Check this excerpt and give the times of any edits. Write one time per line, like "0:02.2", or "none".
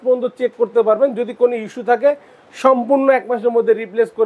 none

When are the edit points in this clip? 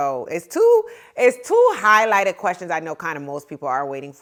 none

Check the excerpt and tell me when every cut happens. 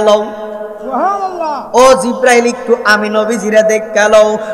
none

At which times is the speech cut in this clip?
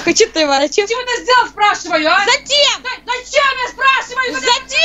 none

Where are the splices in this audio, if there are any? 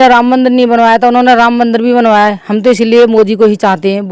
none

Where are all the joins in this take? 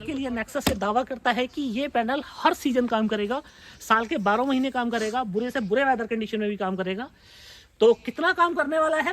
none

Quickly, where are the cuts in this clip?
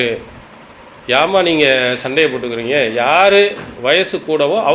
none

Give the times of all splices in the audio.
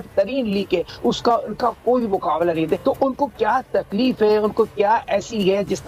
none

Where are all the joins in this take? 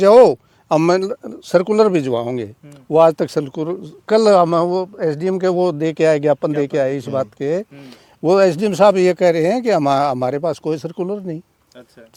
none

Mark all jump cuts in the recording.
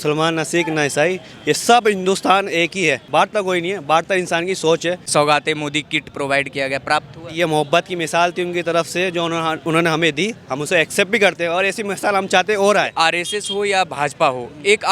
0:03.0
0:05.0
0:12.9

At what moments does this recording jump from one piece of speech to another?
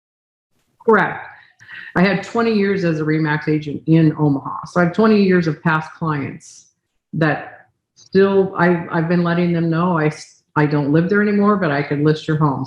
0:01.5

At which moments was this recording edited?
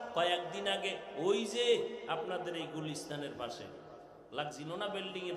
none

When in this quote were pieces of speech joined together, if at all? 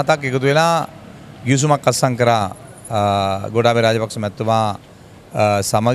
none

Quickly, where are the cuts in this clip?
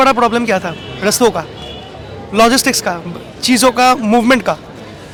none

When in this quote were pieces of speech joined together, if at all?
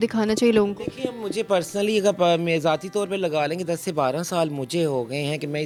none

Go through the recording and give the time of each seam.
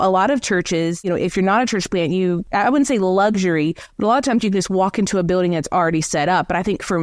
0:01.0
0:02.4

